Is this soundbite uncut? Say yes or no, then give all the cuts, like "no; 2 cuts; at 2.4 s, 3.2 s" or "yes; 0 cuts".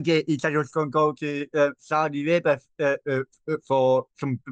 yes; 0 cuts